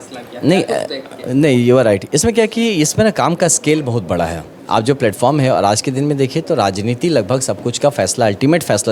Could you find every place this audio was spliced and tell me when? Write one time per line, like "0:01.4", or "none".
none